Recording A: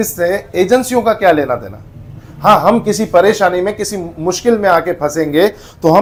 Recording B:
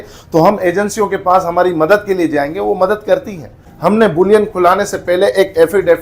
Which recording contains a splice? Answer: B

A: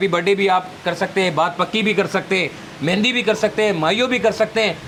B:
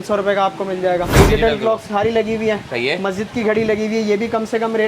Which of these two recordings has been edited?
B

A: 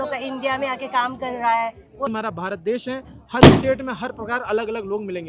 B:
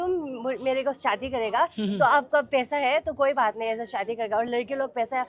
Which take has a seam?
A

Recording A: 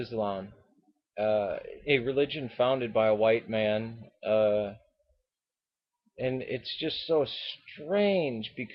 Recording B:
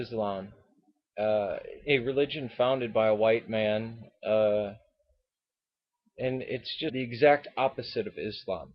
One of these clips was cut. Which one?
A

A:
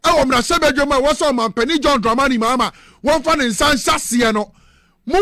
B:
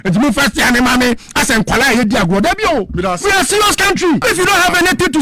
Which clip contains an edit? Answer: B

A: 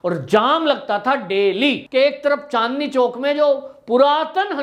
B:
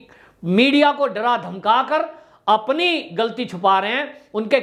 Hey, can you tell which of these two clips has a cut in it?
A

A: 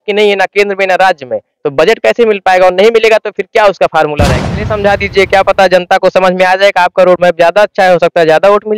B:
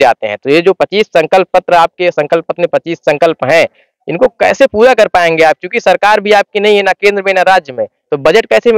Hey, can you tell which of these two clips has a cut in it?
A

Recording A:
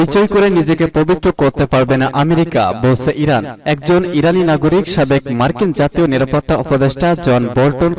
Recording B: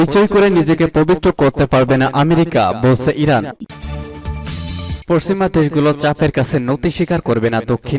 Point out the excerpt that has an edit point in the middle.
B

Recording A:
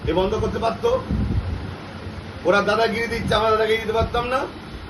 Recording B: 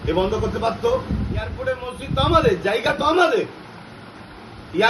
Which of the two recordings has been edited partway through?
B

